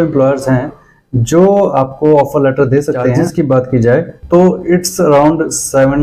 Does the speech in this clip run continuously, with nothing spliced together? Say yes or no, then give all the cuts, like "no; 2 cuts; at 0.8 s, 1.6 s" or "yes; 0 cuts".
no; 1 cut; at 3.2 s